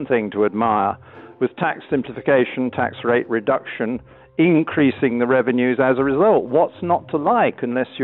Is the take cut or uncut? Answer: uncut